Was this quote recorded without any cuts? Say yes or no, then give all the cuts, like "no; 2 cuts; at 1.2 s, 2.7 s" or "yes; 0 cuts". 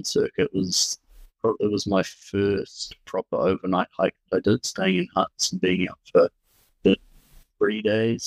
yes; 0 cuts